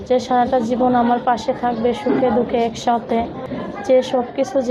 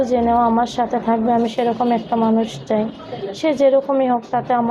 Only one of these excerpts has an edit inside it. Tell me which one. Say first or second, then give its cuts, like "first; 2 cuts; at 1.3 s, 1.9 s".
first; 1 cut; at 3.5 s